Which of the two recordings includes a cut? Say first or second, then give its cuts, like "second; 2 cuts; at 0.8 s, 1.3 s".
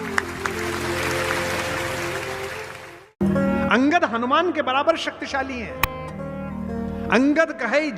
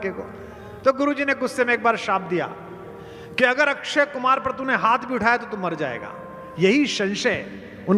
first; 1 cut; at 2.8 s